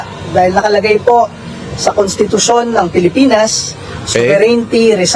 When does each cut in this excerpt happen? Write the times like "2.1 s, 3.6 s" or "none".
none